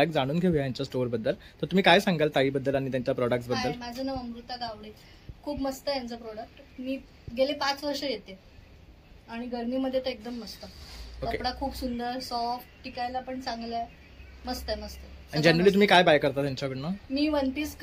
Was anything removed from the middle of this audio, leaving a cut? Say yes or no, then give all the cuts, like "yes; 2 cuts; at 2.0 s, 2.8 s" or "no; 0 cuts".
no; 0 cuts